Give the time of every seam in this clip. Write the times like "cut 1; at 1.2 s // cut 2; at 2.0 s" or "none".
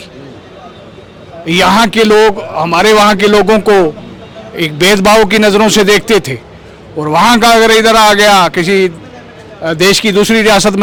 none